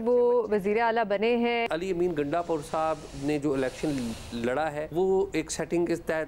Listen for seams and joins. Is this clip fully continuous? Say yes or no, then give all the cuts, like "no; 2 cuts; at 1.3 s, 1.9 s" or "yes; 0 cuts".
no; 2 cuts; at 1.7 s, 4.9 s